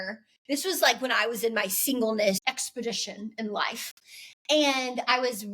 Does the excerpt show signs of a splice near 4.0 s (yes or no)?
no